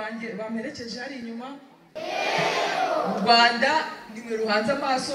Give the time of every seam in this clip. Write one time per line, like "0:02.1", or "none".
0:01.9